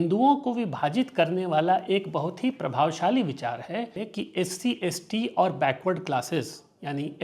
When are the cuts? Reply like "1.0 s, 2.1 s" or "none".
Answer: 4.0 s